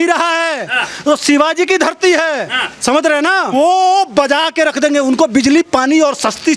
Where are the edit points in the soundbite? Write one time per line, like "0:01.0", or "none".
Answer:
0:03.5